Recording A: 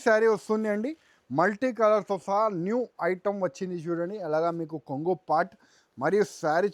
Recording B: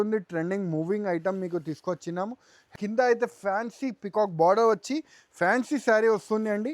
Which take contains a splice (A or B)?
B